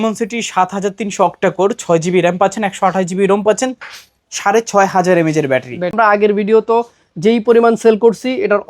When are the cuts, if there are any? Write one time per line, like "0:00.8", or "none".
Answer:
0:05.9